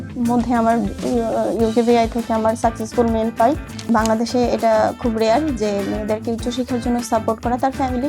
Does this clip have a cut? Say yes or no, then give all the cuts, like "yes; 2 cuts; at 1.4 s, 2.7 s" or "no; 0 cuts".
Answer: yes; 1 cut; at 3.9 s